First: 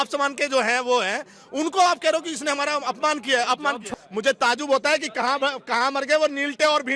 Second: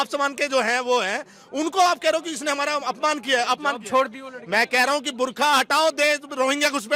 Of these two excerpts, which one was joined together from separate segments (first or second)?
first